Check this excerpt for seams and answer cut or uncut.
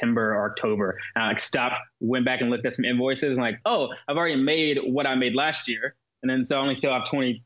cut